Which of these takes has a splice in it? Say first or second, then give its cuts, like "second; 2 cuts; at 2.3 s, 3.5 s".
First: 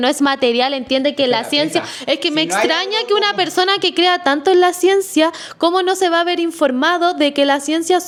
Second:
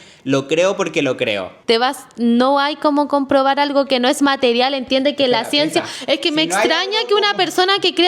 second; 1 cut; at 1.5 s